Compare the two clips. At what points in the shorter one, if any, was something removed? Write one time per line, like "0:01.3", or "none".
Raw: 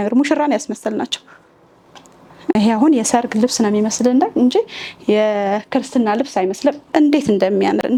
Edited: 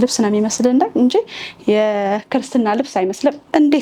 none